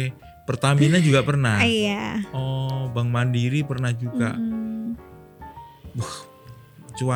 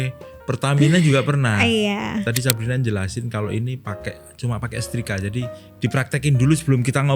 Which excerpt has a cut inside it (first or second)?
second